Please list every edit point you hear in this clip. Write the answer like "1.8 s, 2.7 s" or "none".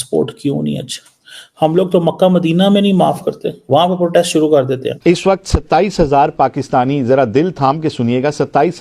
4.9 s